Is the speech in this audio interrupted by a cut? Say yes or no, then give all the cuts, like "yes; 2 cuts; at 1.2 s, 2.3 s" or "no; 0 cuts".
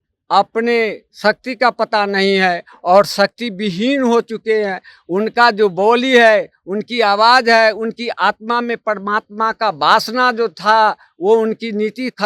no; 0 cuts